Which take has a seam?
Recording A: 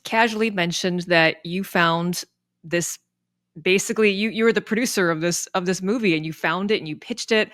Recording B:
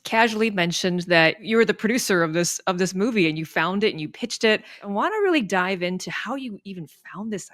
B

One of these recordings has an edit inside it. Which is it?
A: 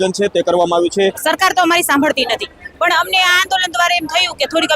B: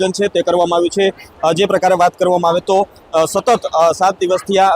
A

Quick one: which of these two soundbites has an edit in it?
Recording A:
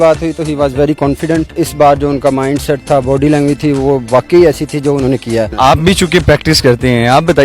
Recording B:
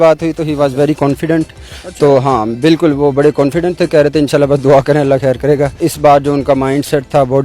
A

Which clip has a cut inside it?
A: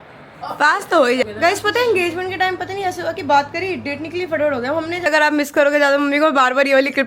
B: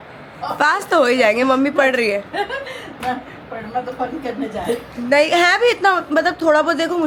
A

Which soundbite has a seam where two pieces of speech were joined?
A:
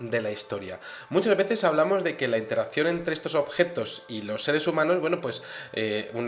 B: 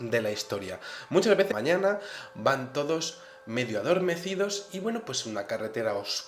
A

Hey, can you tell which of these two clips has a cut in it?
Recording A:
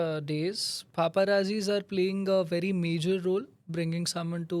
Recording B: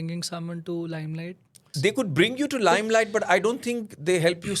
B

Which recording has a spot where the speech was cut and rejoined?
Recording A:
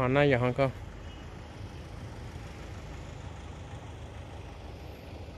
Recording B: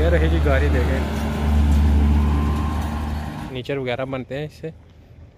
B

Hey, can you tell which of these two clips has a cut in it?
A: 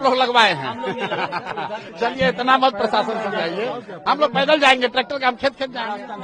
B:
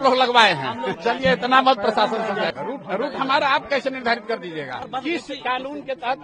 B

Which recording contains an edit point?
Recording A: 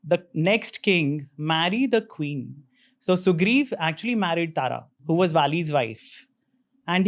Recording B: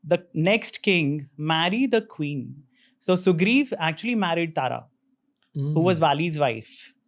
A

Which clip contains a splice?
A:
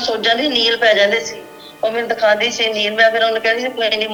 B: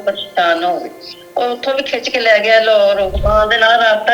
B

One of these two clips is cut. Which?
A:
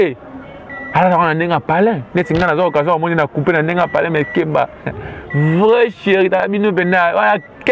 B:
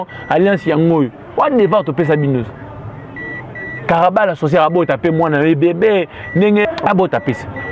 B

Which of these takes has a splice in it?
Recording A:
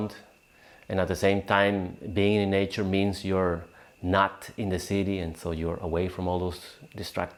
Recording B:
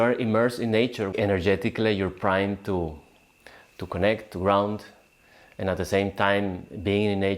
B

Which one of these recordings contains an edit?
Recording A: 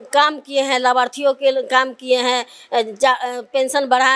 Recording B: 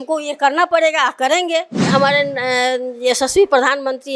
B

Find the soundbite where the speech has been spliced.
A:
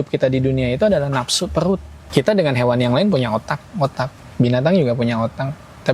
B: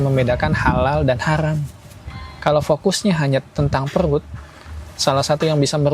A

